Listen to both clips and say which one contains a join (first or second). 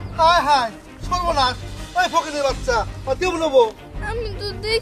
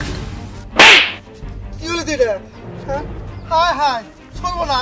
first